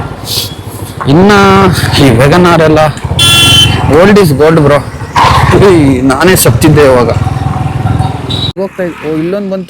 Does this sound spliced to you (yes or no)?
yes